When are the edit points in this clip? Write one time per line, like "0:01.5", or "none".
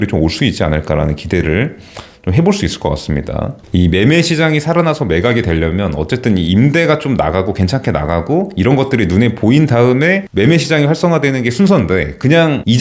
0:03.6